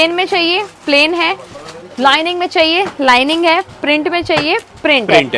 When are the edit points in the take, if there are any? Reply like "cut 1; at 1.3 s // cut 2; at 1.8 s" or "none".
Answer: none